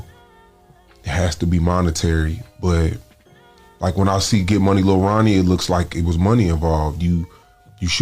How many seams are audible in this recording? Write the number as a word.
zero